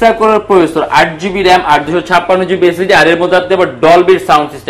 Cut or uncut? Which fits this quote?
uncut